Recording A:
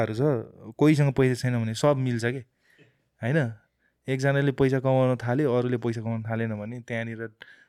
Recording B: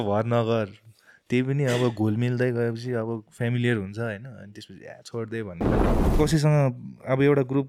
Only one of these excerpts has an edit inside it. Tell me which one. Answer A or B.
B